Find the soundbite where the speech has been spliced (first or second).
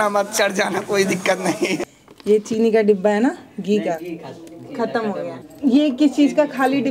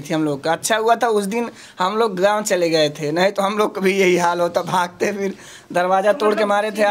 first